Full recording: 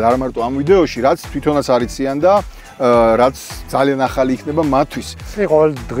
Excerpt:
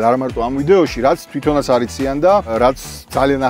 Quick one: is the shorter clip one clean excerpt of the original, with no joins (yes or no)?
no